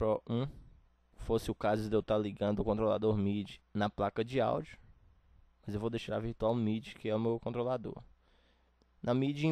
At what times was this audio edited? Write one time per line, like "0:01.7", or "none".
0:01.2
0:03.6